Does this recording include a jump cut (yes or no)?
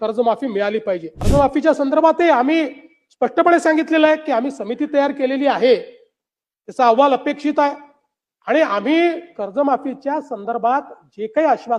yes